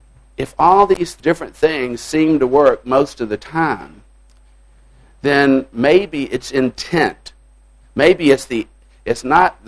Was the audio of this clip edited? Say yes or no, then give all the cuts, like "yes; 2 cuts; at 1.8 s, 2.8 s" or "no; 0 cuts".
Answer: yes; 1 cut; at 1.2 s